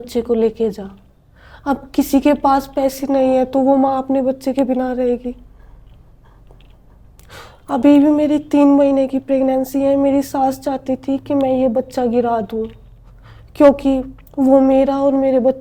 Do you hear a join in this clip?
no; 0 cuts

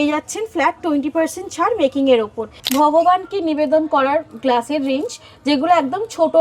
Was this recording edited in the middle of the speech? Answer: yes; 1 cut; at 2.5 s

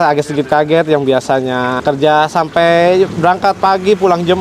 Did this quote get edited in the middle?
yes; 1 cut; at 1.8 s

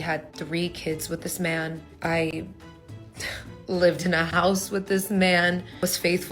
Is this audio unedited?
yes; 0 cuts

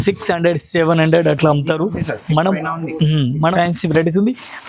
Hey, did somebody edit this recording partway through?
yes; 1 cut; at 3.4 s

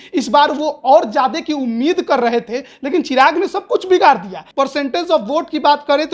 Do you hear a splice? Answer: yes; 1 cut; at 4.4 s

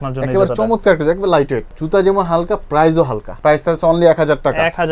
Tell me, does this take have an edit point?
yes; 2 cuts; at 1.7 s, 3.2 s

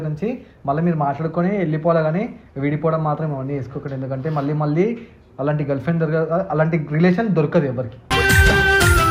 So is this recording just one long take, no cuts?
yes; 0 cuts

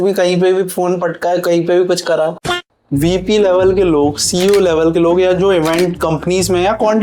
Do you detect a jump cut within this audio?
yes; 1 cut; at 2.5 s

